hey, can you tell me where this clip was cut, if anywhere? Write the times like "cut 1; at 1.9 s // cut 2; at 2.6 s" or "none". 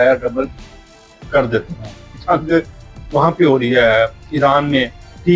cut 1; at 2.2 s